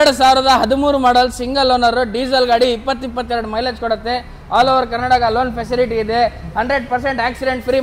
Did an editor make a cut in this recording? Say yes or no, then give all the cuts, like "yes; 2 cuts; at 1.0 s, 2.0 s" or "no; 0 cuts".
no; 0 cuts